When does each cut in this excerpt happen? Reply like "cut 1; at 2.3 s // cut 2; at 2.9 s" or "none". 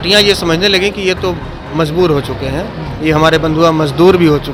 none

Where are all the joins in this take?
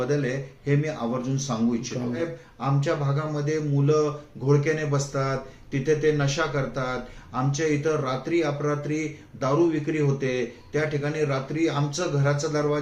cut 1; at 2.2 s

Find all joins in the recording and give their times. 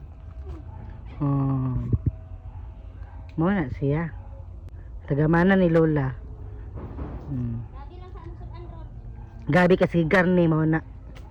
none

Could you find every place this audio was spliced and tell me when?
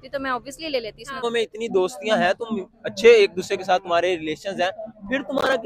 cut 1; at 1.2 s

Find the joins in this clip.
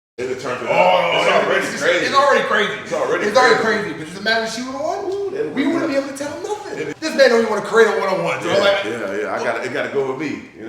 cut 1; at 6.9 s

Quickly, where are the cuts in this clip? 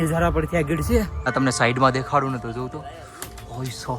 cut 1; at 1.2 s

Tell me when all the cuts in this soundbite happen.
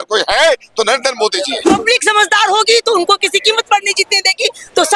cut 1; at 1.7 s

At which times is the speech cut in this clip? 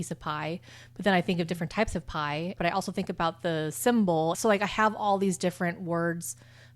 cut 1; at 2.6 s // cut 2; at 4.4 s

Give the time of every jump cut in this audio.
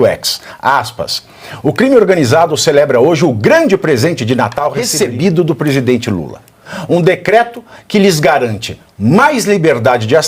cut 1; at 4.8 s

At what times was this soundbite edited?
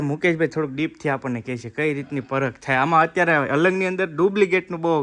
none

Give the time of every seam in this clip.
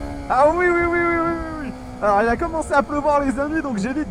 none

